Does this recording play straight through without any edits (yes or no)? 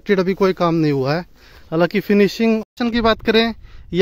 no